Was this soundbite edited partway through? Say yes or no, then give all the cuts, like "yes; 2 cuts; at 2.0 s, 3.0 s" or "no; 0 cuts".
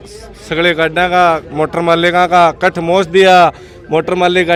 no; 0 cuts